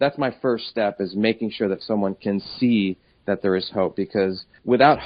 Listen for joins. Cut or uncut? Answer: uncut